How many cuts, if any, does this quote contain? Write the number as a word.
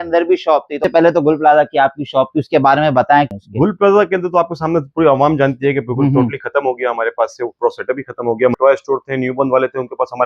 three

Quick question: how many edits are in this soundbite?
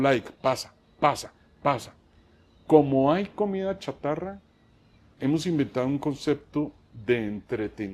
zero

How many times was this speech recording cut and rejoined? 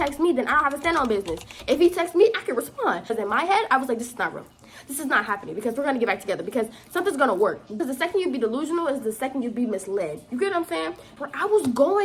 three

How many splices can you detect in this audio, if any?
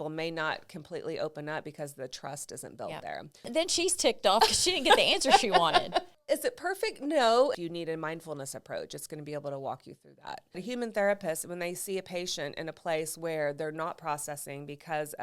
four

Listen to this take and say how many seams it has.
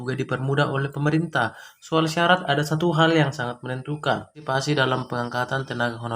one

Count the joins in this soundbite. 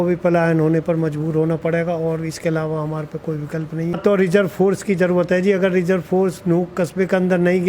one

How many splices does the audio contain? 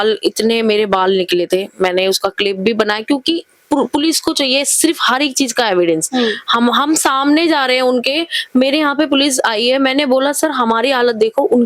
zero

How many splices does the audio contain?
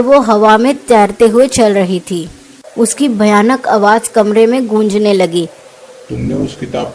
one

